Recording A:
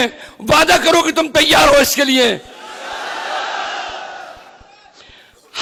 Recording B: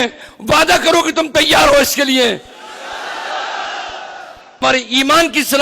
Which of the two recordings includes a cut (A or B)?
B